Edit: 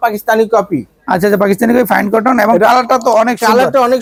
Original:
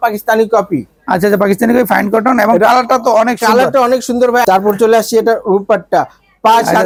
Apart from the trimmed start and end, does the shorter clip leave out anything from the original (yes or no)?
no